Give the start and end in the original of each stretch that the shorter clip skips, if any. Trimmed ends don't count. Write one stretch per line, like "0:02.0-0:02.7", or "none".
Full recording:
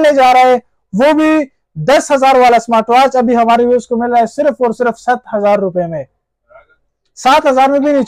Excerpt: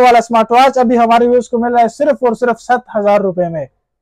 none